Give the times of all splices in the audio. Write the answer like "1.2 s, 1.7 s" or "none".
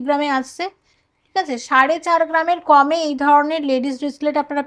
none